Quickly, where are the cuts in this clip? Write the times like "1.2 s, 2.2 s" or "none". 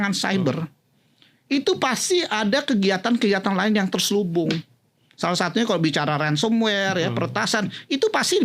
none